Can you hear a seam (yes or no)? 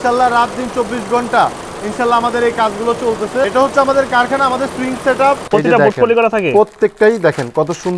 yes